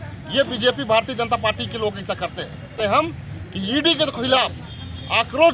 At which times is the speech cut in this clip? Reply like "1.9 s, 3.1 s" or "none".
2.8 s